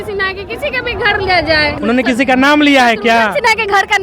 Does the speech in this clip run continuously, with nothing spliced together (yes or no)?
no